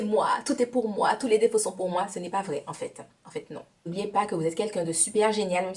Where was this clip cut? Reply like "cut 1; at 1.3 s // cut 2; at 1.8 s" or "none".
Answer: cut 1; at 3.9 s